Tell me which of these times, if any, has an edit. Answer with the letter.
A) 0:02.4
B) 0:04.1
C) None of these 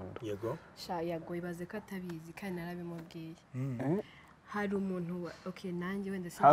C